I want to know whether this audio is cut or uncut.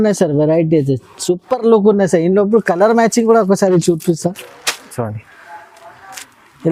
uncut